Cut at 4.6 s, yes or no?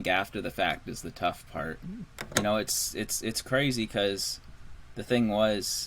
no